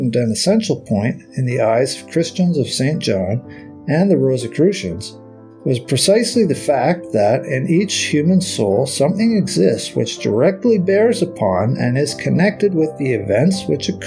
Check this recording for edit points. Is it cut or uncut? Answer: uncut